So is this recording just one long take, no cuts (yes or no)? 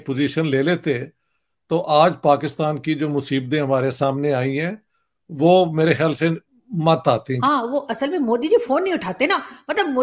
no